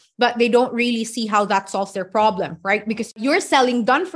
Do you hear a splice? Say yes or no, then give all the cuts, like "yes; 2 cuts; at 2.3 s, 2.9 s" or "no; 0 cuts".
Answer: yes; 1 cut; at 3.2 s